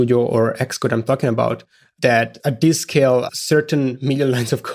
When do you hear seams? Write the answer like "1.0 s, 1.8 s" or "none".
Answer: 2.1 s, 3.4 s